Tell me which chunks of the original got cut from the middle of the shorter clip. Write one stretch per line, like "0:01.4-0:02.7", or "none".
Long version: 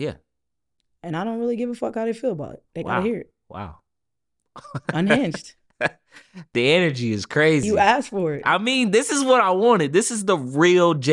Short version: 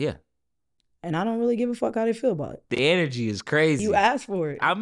0:02.6-0:06.4